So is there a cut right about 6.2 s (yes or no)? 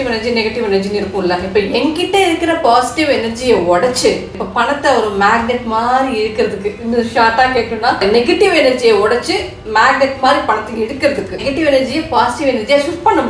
no